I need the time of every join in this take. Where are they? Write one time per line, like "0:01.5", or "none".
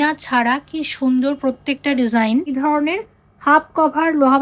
0:02.5